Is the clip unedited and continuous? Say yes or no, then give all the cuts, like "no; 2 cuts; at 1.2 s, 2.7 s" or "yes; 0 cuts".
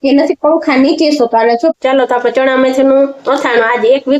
no; 1 cut; at 1.8 s